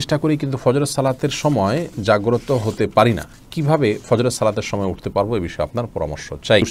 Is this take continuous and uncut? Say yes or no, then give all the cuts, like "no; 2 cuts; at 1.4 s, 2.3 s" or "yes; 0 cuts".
yes; 0 cuts